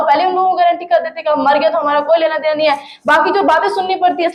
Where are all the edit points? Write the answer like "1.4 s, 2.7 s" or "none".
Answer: none